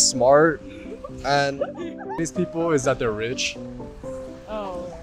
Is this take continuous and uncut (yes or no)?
no